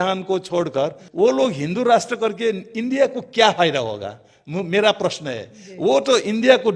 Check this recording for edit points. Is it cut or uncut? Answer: uncut